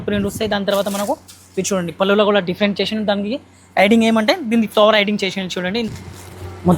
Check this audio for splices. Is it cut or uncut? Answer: cut